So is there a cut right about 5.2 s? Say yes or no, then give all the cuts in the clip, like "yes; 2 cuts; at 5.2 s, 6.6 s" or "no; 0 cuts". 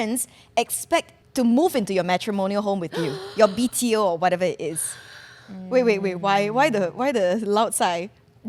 no; 1 cut; at 1.2 s